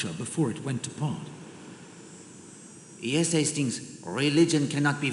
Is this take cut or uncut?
cut